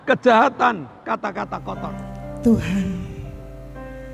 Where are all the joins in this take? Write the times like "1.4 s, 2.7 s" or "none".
1.8 s